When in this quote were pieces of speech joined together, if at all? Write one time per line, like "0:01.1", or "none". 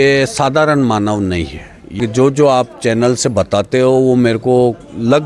0:02.0

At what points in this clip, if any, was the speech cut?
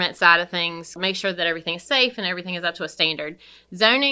0:01.0

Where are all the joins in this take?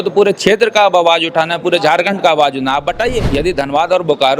0:03.3

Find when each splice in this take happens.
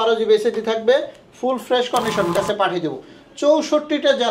0:02.3

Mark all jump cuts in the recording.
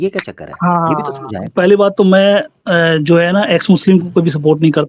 0:01.5

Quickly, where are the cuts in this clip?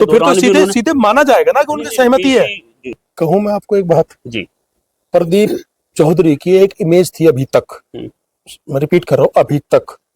0:03.0

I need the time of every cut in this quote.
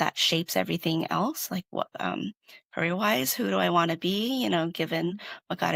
none

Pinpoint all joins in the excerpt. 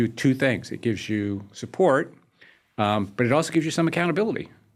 none

